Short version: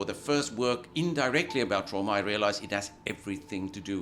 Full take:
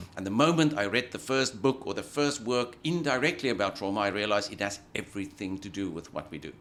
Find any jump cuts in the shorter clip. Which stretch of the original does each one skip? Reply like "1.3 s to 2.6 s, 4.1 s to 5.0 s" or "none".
none